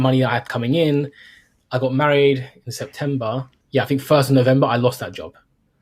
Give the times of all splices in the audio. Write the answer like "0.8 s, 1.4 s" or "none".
3.5 s